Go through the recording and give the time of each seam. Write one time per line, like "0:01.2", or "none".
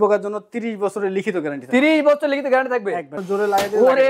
0:03.1